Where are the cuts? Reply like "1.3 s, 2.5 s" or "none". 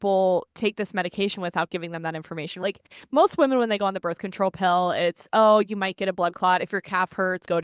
none